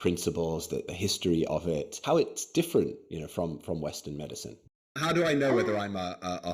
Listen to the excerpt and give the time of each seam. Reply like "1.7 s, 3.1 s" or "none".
0.9 s, 2.0 s, 4.6 s